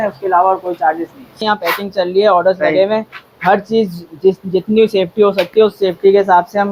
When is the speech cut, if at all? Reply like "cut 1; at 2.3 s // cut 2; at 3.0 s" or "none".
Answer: none